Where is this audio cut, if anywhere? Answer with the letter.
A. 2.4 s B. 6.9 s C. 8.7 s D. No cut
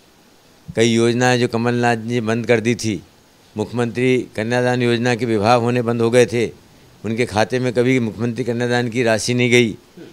D